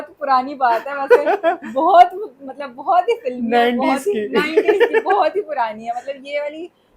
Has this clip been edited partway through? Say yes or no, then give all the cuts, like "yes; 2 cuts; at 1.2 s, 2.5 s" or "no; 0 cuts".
no; 0 cuts